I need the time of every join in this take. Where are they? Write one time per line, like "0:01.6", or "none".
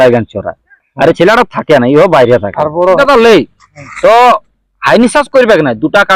0:03.0